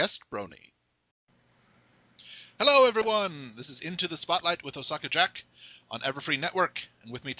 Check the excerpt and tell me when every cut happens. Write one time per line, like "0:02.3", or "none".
none